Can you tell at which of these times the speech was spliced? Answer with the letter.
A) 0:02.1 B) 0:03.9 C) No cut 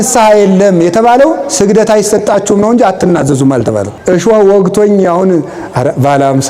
B